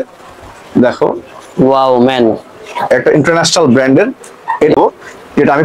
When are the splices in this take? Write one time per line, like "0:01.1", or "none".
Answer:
0:04.8

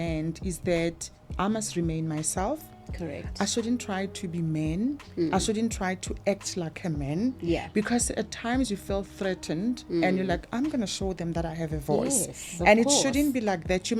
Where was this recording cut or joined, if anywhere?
none

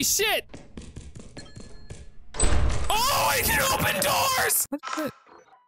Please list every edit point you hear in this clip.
0:04.6

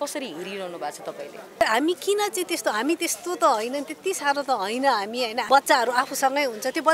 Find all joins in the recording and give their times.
0:01.6
0:05.4

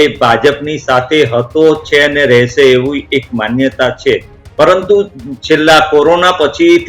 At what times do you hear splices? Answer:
none

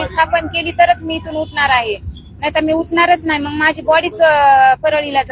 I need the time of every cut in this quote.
none

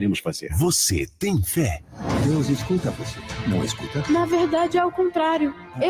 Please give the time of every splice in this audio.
none

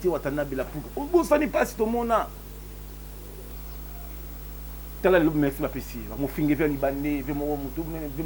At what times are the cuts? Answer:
0:03.5

